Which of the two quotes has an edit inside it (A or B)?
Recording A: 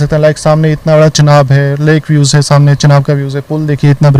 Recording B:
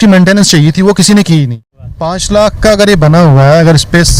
B